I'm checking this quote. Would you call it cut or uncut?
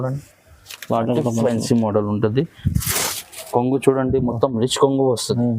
cut